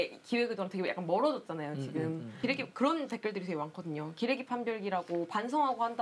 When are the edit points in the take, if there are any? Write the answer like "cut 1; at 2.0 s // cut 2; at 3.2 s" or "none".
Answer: cut 1; at 2.3 s